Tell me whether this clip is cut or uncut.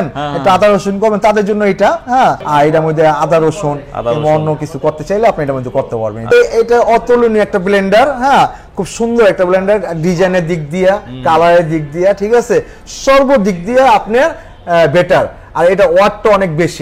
cut